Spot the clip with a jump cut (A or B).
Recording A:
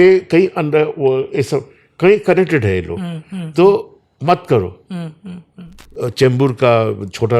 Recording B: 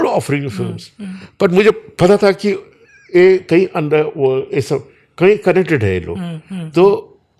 A